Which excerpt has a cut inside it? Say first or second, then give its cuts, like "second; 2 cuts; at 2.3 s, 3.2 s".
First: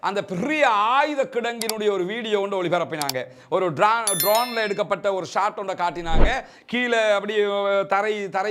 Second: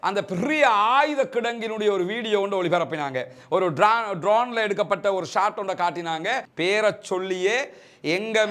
second; 1 cut; at 6.4 s